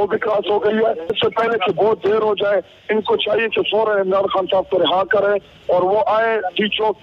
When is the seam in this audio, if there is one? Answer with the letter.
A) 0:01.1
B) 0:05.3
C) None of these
A